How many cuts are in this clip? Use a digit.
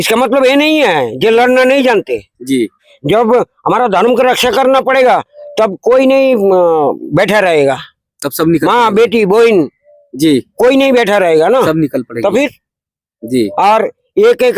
1